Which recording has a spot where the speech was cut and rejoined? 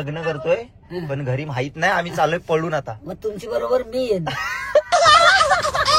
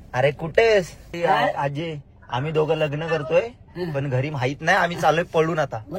second; 1 cut; at 1.0 s

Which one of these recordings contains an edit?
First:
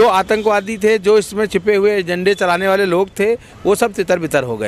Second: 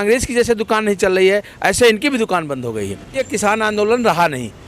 second; 1 cut; at 3.2 s

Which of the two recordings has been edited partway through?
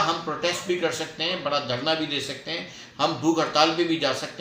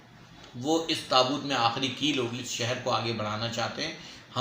second; 1 cut; at 2.4 s

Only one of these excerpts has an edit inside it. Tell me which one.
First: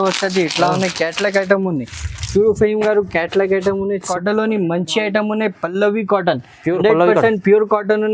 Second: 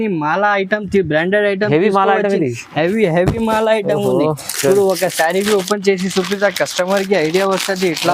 first; 1 cut; at 4.1 s

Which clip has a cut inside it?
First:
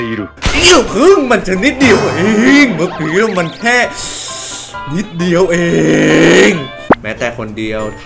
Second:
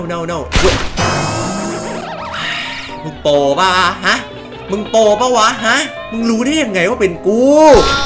first; 1 cut; at 6.7 s

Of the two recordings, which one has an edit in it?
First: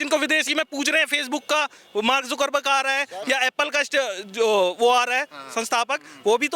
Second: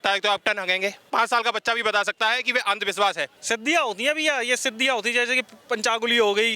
second; 2 cuts; at 1.1 s, 3.4 s

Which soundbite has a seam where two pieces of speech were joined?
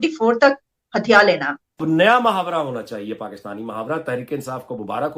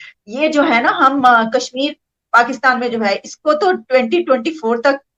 first; 1 cut; at 1.8 s

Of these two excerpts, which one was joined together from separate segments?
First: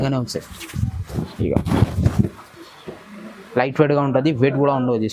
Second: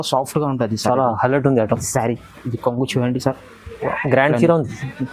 second; 1 cut; at 1.9 s

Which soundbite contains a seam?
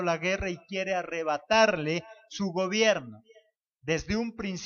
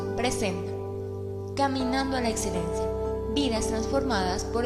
first; 1 cut; at 2.9 s

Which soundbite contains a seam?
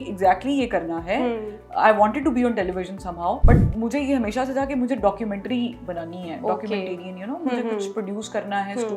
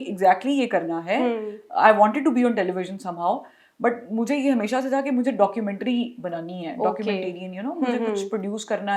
first; 1 cut; at 3.4 s

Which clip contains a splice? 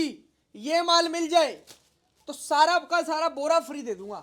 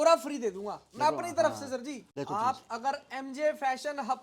second; 1 cut; at 2.0 s

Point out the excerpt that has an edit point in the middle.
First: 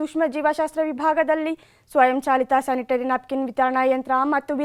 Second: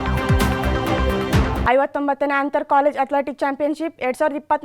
second; 1 cut; at 1.5 s

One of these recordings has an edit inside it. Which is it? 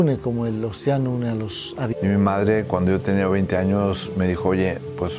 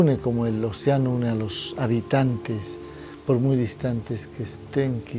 first; 1 cut; at 1.9 s

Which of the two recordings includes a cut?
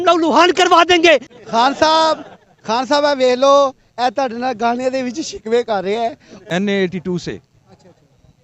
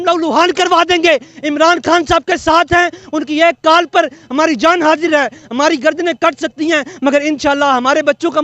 first; 2 cuts; at 1.3 s, 6.3 s

